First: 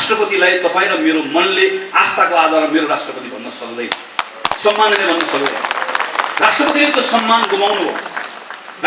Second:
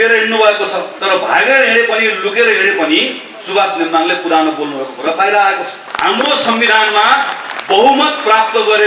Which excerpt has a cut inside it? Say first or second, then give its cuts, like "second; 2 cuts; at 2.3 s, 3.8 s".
second; 2 cuts; at 0.9 s, 5.8 s